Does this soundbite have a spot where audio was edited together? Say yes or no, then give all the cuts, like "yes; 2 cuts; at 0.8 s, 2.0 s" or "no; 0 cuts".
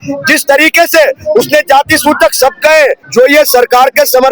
yes; 1 cut; at 3.0 s